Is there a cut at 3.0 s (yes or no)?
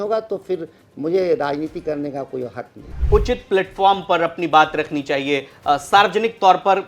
yes